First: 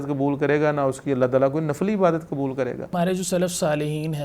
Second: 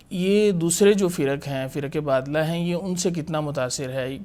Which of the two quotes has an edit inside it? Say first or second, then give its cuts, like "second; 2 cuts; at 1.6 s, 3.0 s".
first; 1 cut; at 2.9 s